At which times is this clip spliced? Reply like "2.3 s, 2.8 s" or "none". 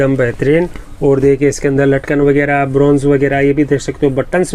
none